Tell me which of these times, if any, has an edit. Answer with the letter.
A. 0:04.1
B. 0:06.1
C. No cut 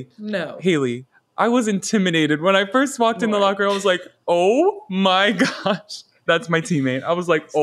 B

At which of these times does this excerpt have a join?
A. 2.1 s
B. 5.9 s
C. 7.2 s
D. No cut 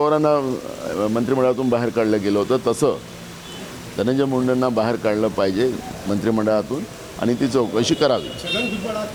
D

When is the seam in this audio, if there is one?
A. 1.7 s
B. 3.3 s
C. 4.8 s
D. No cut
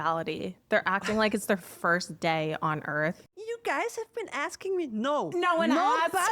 B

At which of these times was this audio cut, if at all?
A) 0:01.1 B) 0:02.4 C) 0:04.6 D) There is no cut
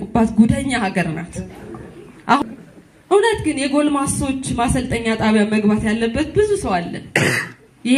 B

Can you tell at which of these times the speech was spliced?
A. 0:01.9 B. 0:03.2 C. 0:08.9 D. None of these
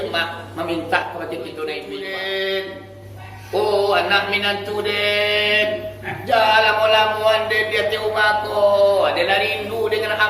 A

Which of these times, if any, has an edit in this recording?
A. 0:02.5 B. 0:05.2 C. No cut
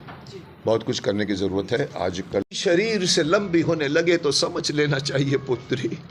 A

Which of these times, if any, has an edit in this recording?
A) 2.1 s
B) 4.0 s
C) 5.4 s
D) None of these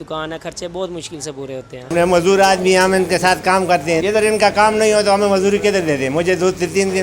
B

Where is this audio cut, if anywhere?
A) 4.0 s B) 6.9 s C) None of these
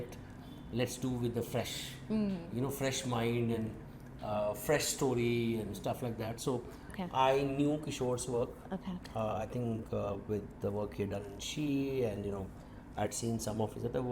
B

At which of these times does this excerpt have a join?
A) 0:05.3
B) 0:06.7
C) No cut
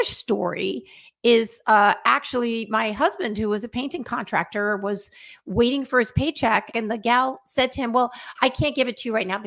B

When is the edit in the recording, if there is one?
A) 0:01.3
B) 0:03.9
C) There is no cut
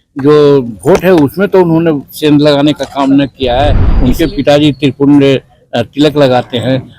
B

